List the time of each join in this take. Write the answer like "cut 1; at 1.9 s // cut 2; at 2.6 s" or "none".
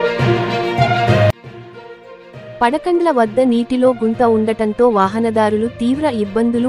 cut 1; at 1.4 s